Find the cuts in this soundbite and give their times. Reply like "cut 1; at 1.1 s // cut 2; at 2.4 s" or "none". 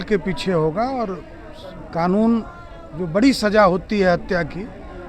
none